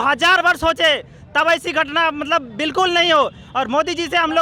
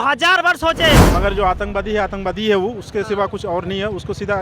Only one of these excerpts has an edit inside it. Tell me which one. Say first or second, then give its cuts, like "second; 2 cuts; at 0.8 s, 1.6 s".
second; 1 cut; at 1.1 s